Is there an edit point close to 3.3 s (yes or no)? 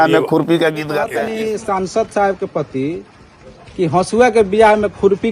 no